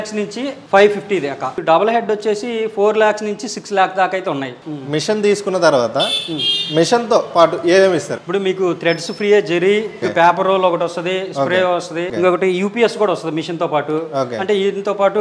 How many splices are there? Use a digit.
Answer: 5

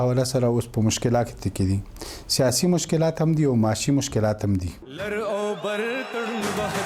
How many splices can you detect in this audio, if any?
1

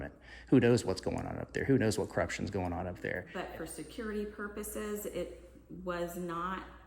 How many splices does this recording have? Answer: 1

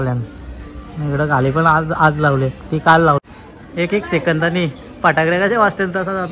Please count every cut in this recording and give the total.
1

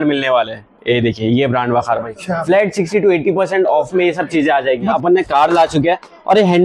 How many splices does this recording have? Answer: 1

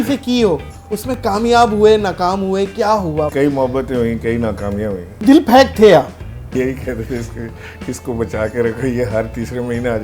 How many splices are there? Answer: 3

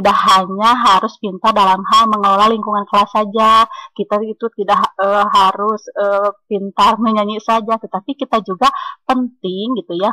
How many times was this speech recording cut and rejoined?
0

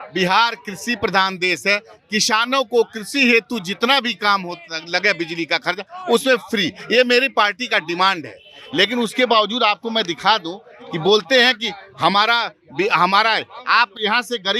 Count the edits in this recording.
0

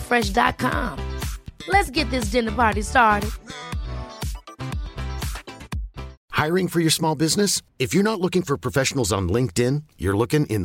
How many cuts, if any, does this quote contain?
1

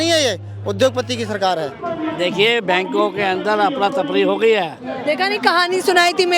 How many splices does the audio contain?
2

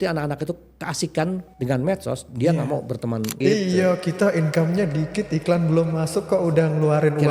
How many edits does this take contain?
2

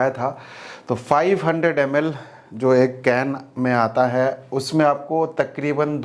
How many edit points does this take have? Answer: 0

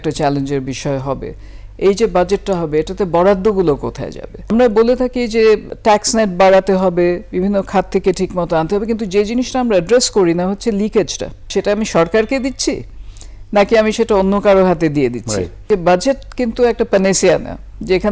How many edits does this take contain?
4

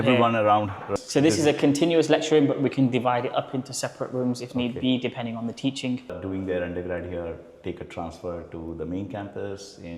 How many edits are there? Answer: 2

